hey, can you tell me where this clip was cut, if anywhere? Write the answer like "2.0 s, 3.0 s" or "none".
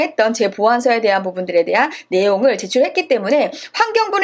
none